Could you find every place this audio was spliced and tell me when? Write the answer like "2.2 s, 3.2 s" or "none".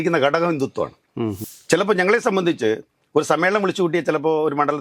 1.5 s